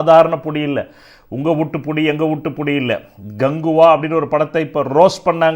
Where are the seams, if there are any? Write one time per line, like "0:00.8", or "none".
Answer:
none